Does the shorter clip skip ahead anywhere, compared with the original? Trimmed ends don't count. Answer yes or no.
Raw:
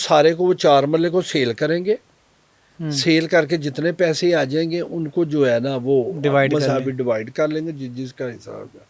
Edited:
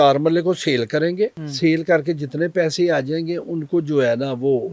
yes